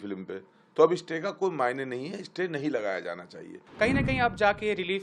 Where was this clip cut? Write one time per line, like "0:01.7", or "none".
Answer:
0:03.6

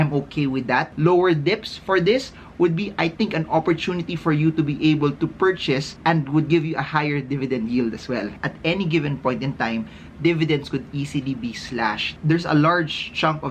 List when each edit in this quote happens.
0:00.9
0:05.9
0:08.4
0:12.1

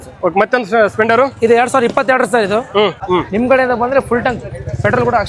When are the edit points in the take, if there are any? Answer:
0:03.0

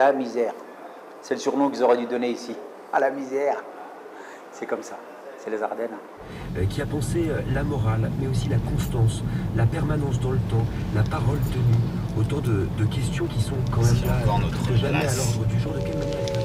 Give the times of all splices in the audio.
none

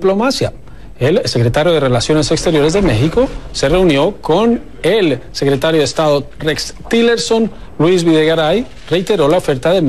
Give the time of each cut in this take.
none

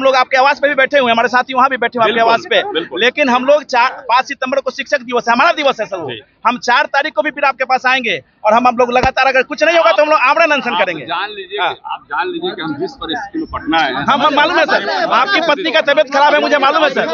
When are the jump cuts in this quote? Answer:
none

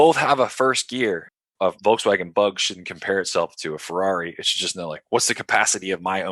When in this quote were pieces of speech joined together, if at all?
0:01.5

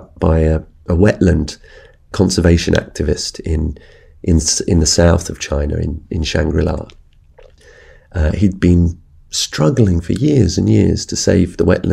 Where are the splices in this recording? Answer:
0:02.1
0:07.6

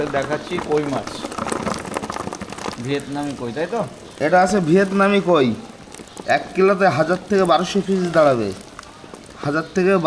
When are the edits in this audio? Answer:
none

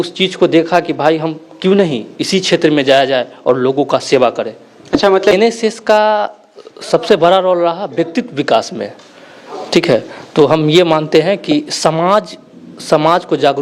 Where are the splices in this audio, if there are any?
0:05.3

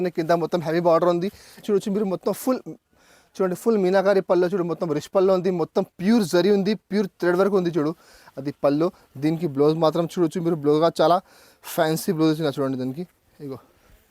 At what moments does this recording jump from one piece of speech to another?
0:01.6

